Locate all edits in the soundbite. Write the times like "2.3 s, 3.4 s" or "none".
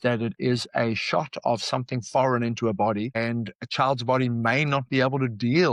none